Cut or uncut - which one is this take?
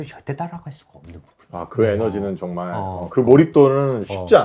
uncut